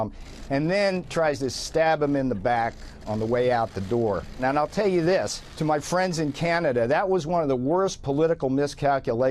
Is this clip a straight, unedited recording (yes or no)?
no